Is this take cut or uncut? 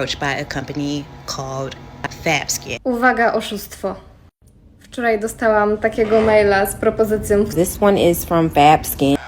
cut